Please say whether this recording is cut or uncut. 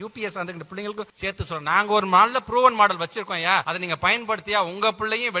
cut